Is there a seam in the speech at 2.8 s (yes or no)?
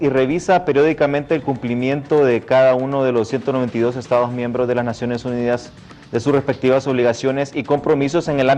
no